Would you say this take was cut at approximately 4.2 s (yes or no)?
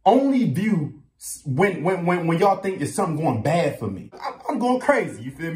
yes